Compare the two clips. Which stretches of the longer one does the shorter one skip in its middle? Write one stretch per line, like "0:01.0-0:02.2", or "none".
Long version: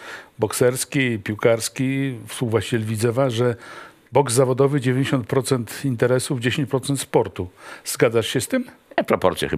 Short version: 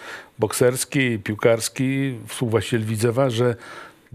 none